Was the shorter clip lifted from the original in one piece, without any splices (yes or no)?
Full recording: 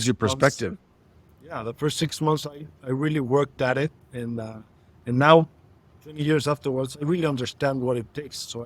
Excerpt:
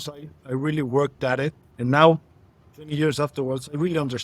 no